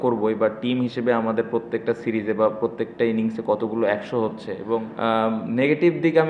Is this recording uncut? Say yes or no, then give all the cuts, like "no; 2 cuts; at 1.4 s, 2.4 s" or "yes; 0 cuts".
no; 1 cut; at 4.9 s